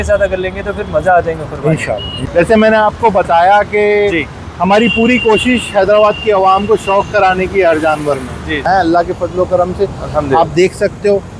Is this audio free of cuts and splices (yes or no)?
no